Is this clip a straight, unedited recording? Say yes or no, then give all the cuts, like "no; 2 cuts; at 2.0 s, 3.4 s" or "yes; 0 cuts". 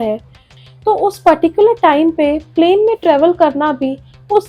yes; 0 cuts